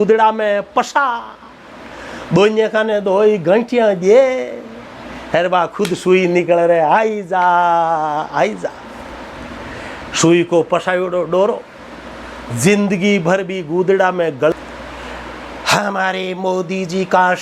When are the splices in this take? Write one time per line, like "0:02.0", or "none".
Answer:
0:14.5